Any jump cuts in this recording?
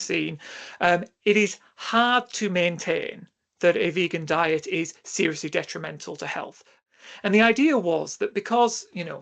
yes; 1 cut; at 6.6 s

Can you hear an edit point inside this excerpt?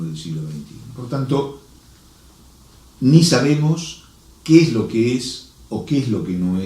yes; 1 cut; at 5.6 s

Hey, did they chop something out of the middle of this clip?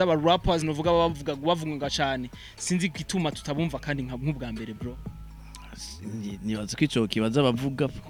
no; 0 cuts

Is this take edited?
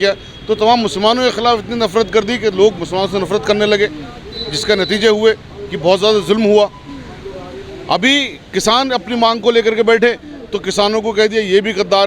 no; 0 cuts

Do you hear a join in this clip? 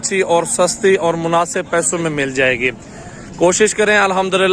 no; 0 cuts

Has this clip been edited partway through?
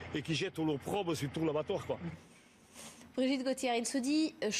yes; 1 cut; at 1.4 s

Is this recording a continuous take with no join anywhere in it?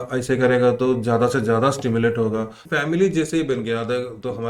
no; 1 cut; at 2.6 s

